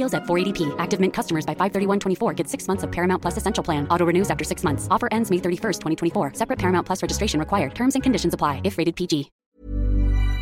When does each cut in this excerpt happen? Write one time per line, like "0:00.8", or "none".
0:09.4